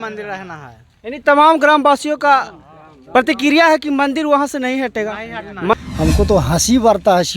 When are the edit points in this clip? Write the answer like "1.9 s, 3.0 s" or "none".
5.7 s